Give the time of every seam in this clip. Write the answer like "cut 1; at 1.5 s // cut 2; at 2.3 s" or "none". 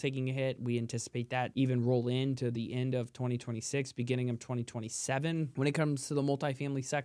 cut 1; at 1.5 s // cut 2; at 5.5 s